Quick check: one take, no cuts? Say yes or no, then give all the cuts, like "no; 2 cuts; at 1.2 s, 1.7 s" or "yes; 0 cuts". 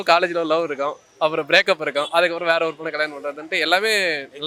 yes; 0 cuts